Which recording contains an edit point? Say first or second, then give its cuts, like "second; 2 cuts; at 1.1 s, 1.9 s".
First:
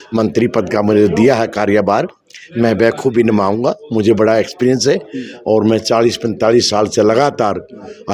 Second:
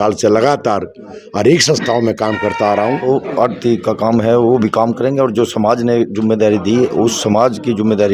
second; 1 cut; at 3.0 s